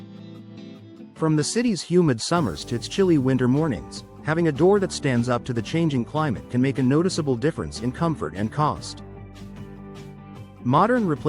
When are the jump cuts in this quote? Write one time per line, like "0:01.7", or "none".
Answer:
0:01.1
0:08.8
0:10.3